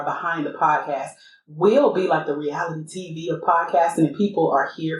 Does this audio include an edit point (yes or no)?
no